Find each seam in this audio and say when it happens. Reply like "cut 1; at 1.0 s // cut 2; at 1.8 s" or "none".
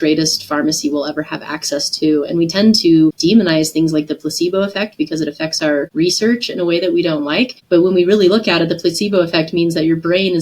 cut 1; at 3.2 s // cut 2; at 5.9 s // cut 3; at 7.6 s